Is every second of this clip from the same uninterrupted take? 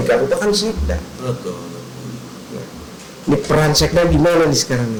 yes; 0 cuts

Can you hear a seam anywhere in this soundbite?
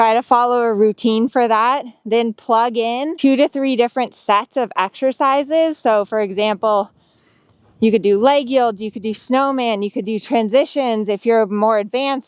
yes; 1 cut; at 3.1 s

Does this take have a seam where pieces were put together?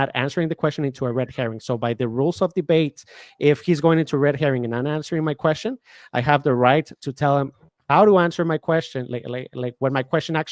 no; 0 cuts

